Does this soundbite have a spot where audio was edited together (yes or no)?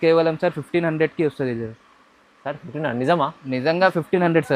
no